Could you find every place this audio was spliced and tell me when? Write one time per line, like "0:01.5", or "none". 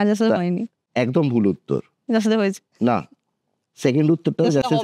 none